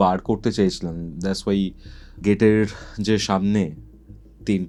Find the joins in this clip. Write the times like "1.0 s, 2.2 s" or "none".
none